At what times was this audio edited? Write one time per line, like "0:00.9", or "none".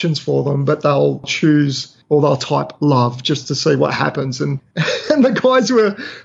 0:04.7